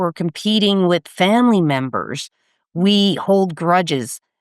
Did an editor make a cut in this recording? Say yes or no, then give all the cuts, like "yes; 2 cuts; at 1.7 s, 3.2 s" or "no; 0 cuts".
no; 0 cuts